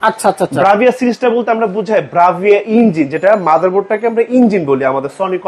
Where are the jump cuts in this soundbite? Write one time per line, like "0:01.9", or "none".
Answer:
none

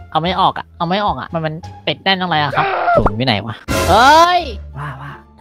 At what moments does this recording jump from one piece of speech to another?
none

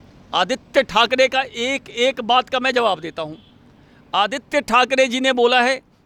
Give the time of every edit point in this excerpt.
none

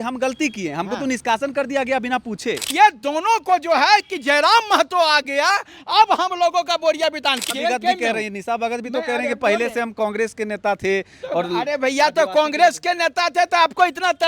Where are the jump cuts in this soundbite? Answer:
0:02.6
0:07.4

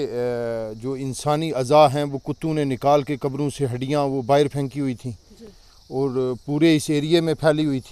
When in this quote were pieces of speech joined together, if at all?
none

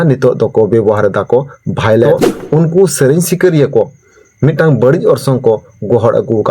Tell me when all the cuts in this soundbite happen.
0:02.1

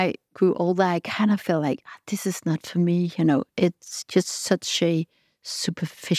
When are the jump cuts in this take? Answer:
none

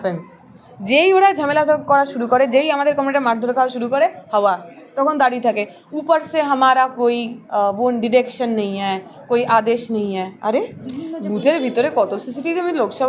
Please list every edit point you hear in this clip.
0:10.8

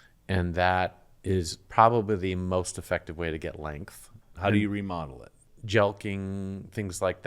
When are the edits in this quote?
0:04.2
0:05.4

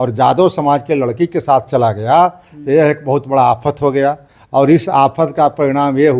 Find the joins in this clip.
none

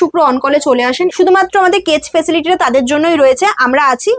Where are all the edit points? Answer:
0:01.1

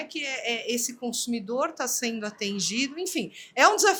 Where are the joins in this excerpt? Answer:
none

